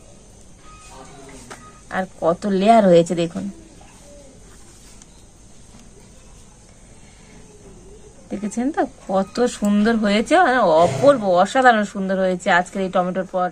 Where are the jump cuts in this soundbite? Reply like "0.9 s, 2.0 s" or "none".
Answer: none